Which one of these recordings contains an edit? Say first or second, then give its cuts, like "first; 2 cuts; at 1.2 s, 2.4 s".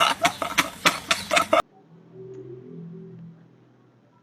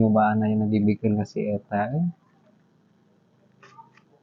first; 1 cut; at 1.6 s